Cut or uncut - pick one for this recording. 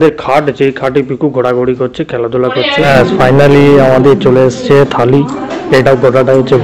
cut